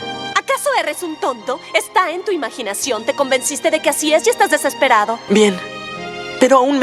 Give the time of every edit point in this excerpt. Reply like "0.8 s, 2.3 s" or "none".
5.2 s